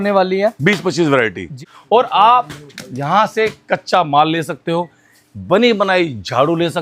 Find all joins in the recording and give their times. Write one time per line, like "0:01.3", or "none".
0:01.5